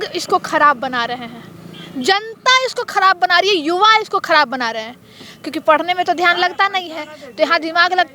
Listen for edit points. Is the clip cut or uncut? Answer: uncut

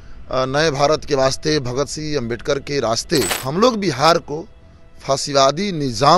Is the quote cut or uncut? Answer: cut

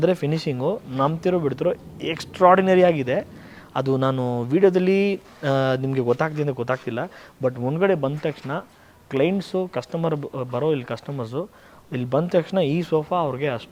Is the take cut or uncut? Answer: uncut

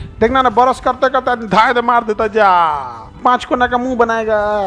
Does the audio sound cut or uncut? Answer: cut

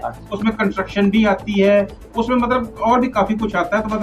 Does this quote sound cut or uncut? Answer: uncut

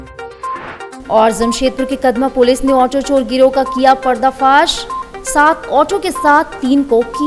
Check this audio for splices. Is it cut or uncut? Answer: cut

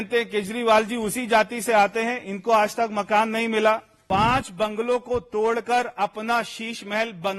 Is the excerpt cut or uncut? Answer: cut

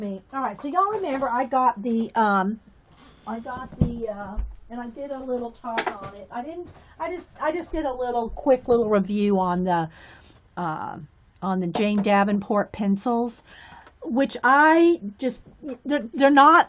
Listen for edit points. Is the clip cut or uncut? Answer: cut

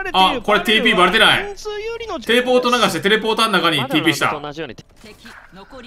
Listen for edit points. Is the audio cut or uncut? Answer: cut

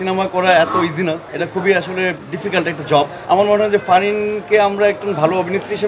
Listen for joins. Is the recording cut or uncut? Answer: uncut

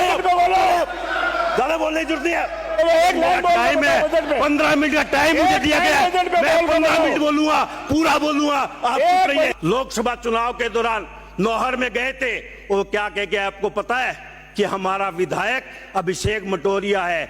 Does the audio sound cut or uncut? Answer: cut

